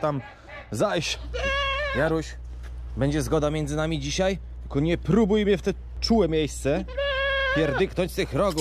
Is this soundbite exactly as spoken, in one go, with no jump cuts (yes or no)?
no